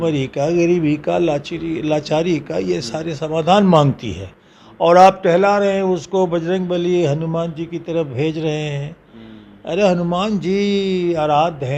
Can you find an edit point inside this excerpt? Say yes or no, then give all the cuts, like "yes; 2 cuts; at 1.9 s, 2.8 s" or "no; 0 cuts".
no; 0 cuts